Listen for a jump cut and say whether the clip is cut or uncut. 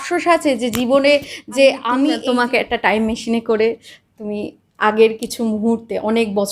cut